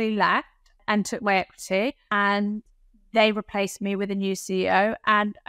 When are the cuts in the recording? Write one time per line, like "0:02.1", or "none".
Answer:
0:00.8
0:02.0